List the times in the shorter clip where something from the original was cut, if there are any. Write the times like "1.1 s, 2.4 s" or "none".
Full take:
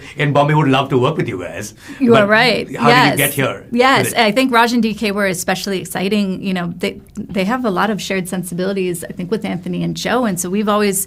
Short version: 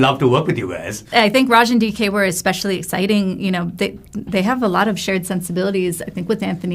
1.1 s